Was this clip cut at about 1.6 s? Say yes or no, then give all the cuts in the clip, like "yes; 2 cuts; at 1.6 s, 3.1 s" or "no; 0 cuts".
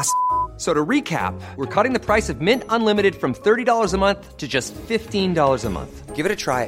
no; 0 cuts